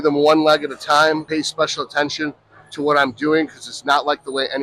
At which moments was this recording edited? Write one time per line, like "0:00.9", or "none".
0:01.3